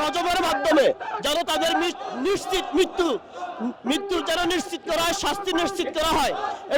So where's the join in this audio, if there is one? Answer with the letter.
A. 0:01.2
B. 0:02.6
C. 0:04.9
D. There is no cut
D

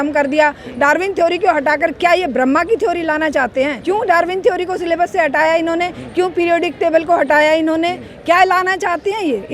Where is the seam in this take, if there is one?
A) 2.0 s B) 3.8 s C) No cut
B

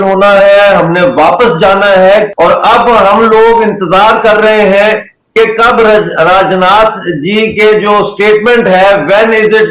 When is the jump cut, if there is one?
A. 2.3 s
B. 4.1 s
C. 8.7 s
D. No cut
A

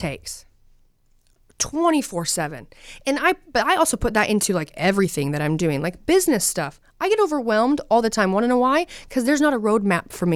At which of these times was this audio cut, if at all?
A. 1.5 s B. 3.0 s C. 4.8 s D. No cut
D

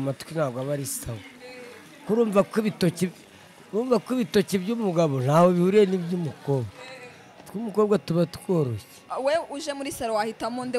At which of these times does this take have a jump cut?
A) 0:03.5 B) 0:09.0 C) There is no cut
B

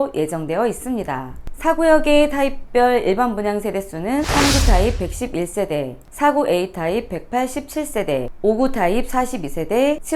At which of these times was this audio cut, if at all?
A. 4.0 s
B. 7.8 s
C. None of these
C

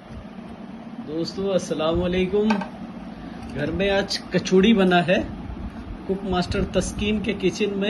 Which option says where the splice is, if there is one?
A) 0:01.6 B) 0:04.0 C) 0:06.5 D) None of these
D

